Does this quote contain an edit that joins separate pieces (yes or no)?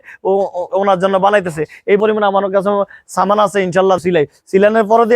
yes